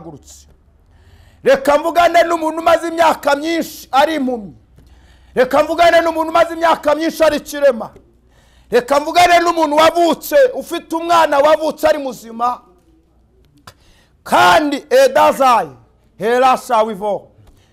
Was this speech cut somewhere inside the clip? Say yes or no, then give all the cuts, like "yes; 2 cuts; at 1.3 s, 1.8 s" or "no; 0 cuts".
no; 0 cuts